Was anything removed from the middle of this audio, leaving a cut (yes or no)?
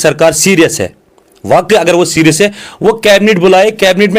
no